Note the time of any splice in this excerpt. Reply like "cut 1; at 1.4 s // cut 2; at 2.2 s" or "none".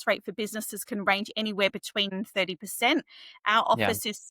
cut 1; at 2.1 s

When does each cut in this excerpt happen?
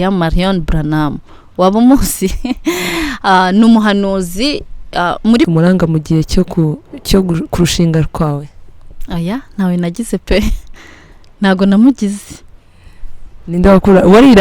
cut 1; at 5.4 s

